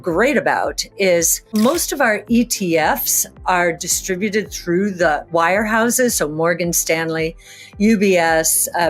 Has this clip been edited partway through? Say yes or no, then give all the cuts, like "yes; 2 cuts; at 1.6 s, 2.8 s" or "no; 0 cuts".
yes; 2 cuts; at 1.5 s, 5.2 s